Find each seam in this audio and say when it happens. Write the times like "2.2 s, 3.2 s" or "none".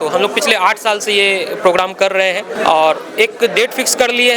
2.5 s